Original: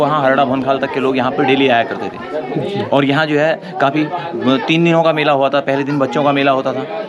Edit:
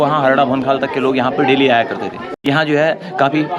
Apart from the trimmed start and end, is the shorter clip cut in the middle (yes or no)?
yes